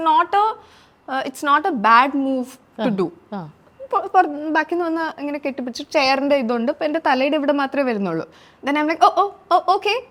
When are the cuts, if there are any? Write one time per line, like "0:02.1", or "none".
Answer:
none

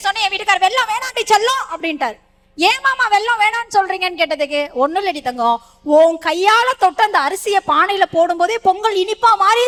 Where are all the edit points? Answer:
none

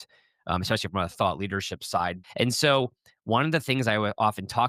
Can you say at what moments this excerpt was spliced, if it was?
0:02.2

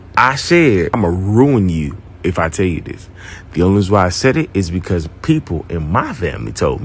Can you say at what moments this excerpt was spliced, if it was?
0:00.9

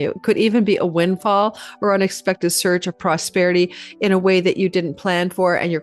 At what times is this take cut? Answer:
none

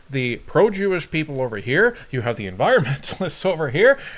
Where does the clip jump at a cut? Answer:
none

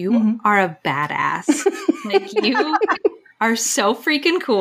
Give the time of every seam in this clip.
0:03.3

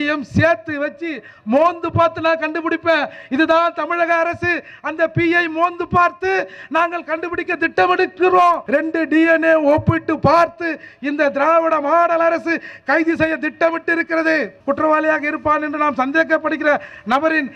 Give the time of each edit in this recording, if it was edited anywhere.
0:08.6
0:14.5

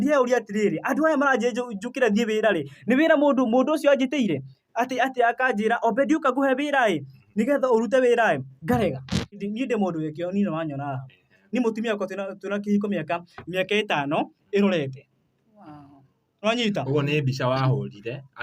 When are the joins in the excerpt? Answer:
0:09.3

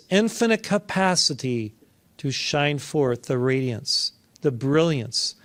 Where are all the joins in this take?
none

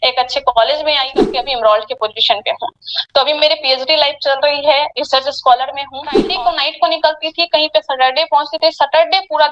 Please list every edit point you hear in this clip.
0:01.4
0:06.2

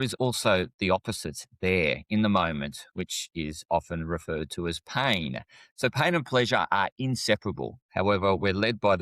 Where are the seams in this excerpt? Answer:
0:07.8

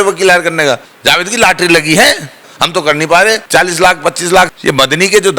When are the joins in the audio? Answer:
0:00.9
0:02.5
0:03.4
0:04.5

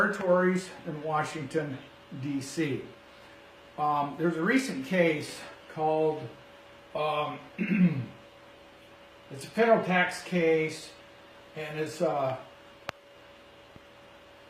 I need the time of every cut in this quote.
0:09.9

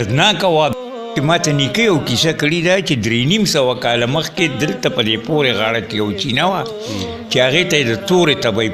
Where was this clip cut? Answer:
0:01.1

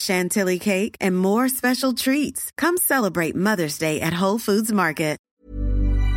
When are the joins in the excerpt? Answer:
0:05.2

